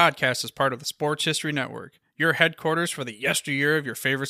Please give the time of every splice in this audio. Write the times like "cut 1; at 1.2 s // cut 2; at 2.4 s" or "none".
none